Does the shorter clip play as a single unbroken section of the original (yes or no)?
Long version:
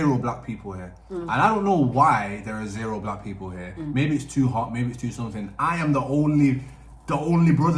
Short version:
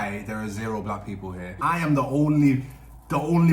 no